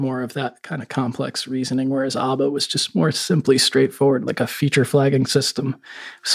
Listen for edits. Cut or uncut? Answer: uncut